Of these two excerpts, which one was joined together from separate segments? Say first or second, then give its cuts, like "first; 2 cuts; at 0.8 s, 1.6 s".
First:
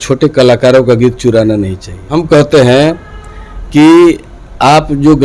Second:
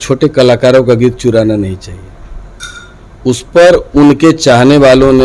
first; 1 cut; at 2.0 s